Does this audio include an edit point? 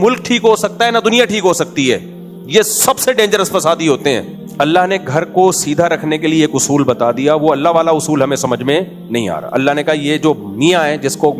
yes; 1 cut; at 4.4 s

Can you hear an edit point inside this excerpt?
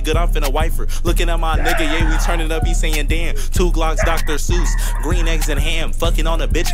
no; 0 cuts

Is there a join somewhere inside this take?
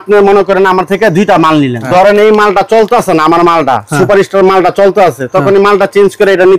yes; 1 cut; at 1.8 s

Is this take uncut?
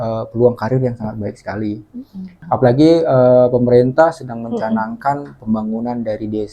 no; 1 cut; at 2.4 s

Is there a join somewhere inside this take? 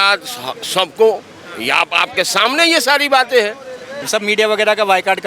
yes; 1 cut; at 3.9 s

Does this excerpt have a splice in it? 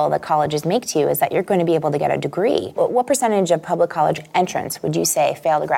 yes; 2 cuts; at 2.8 s, 4.2 s

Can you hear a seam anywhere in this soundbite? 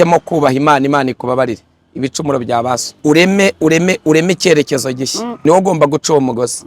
yes; 2 cuts; at 2.9 s, 5.3 s

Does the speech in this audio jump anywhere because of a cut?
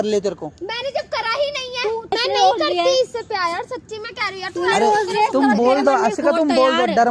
yes; 1 cut; at 2.1 s

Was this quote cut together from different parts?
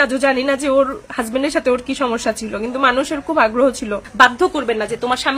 yes; 1 cut; at 4.0 s

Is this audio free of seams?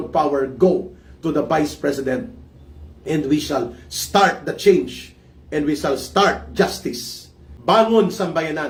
yes; 0 cuts

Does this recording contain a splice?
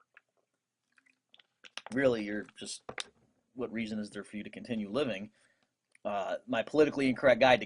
yes; 1 cut; at 2.5 s

